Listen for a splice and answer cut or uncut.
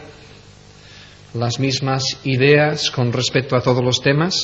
cut